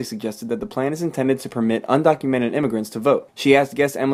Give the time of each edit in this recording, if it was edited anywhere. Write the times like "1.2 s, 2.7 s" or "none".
none